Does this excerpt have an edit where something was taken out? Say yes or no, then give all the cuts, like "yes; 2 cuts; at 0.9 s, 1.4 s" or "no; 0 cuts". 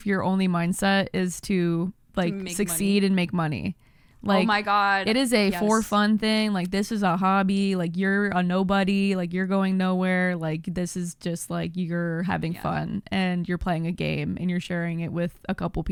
no; 0 cuts